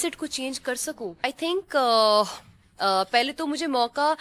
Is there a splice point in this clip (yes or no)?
yes